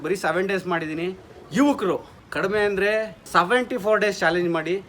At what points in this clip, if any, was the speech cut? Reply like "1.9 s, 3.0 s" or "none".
2.2 s, 3.2 s

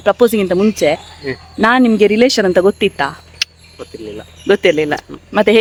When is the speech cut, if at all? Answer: none

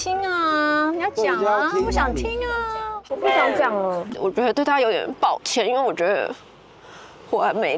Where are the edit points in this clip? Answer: 4.1 s

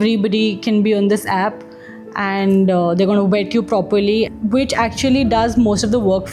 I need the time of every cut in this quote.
none

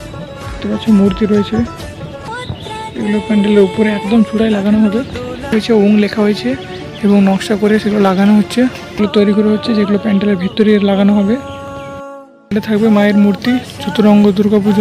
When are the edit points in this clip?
2.2 s, 5.5 s, 9.0 s

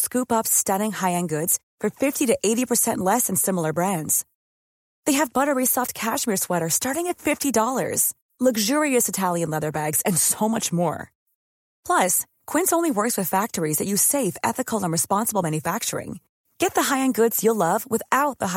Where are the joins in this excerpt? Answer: none

